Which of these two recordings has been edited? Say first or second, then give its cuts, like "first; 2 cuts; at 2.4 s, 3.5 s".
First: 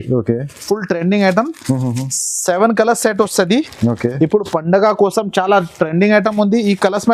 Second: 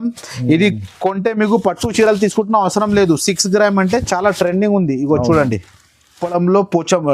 second; 1 cut; at 6.2 s